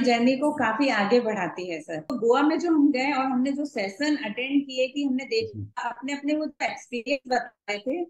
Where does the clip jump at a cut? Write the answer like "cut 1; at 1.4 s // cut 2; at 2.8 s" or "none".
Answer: cut 1; at 2.1 s